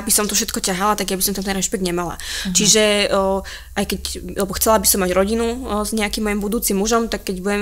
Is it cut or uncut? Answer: uncut